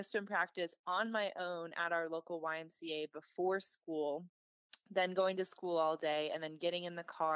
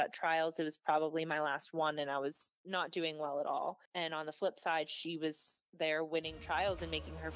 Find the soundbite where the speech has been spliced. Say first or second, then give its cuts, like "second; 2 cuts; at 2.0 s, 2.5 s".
second; 1 cut; at 3.9 s